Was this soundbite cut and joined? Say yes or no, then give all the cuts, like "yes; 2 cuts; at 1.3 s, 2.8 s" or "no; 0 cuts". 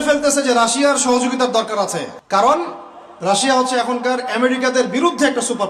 yes; 1 cut; at 2.2 s